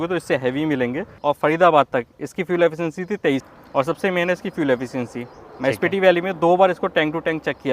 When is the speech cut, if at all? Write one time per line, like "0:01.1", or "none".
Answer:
0:01.1
0:03.5